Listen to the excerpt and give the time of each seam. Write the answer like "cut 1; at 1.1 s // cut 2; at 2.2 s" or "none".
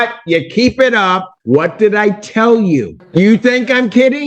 cut 1; at 1.3 s // cut 2; at 3.0 s